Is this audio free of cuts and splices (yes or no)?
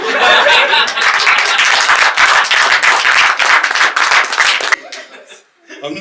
no